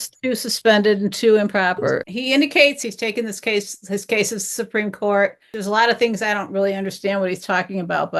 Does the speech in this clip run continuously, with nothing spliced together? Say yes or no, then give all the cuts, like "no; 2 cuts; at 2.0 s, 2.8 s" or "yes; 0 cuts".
no; 3 cuts; at 2.0 s, 2.8 s, 5.5 s